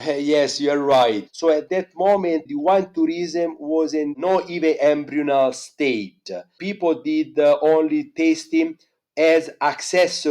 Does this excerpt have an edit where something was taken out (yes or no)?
yes